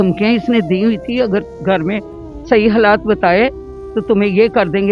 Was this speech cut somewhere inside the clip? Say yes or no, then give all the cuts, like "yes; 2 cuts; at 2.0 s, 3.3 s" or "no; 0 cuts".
no; 0 cuts